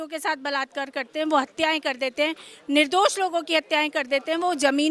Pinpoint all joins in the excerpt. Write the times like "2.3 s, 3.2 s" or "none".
none

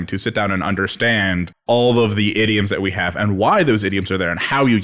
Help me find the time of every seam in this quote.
1.5 s

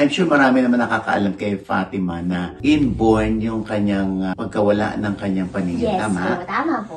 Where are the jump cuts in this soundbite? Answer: none

